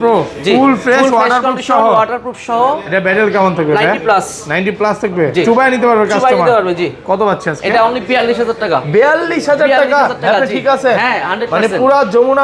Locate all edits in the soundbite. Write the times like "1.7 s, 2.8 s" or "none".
none